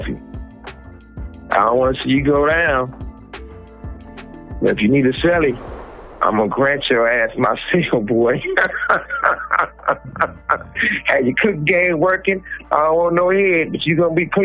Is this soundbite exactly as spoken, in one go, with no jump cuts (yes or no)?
yes